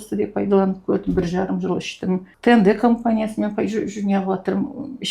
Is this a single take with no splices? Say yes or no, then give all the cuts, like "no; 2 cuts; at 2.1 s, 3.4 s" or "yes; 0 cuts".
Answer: no; 1 cut; at 2.3 s